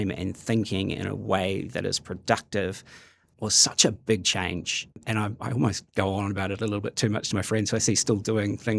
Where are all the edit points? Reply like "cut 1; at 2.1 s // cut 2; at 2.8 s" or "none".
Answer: cut 1; at 3.3 s